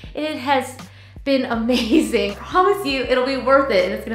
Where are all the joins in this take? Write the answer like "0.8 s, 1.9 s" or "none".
2.3 s